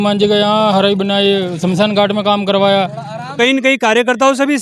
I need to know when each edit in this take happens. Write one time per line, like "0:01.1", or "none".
0:03.4